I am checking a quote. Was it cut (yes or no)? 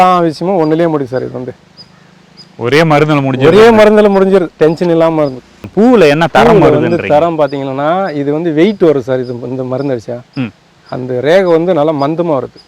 yes